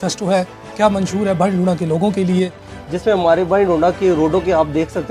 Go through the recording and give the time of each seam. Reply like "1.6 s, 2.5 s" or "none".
2.7 s